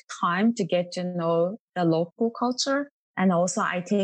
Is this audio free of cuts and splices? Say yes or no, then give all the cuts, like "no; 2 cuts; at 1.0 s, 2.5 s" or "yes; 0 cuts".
no; 1 cut; at 3.0 s